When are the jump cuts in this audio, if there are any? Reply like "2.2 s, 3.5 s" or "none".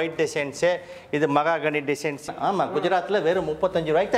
2.2 s